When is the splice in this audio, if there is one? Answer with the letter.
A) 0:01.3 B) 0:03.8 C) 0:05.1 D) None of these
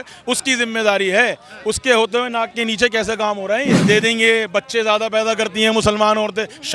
B